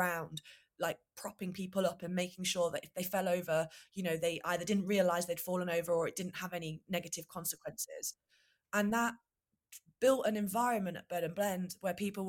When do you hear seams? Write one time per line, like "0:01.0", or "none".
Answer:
none